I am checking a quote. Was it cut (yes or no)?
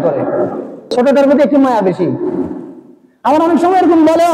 yes